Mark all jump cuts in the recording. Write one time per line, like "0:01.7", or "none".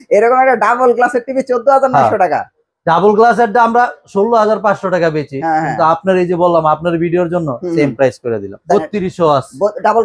0:08.6